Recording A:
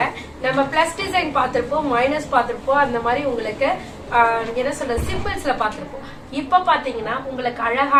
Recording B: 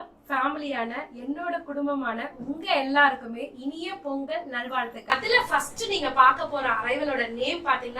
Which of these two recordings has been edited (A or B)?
B